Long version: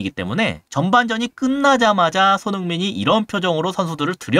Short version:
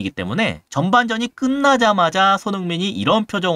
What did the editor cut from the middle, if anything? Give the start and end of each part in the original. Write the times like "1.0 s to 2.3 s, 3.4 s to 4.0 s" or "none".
none